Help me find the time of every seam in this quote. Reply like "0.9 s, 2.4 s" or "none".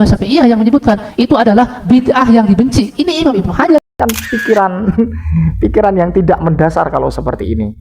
3.9 s